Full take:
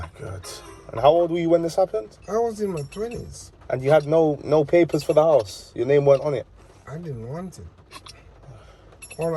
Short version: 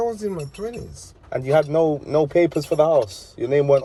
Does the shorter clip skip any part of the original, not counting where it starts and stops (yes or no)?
no